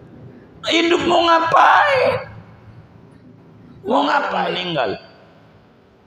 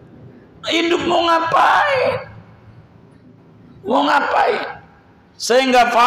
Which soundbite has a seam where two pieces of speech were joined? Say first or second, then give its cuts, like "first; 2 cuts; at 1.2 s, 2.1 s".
first; 1 cut; at 4.6 s